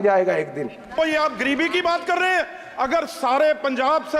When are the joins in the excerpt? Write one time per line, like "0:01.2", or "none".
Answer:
0:01.0